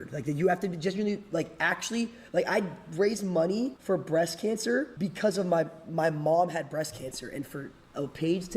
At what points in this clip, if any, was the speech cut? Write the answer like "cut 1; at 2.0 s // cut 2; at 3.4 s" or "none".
cut 1; at 3.8 s // cut 2; at 4.9 s